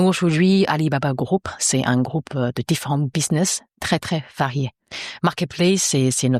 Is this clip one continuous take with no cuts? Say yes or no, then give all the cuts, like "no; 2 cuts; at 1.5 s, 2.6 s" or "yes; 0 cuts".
yes; 0 cuts